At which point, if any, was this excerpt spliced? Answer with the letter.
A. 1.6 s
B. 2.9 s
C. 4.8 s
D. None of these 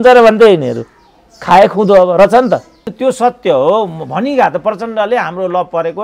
B